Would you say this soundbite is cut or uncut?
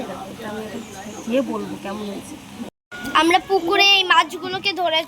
cut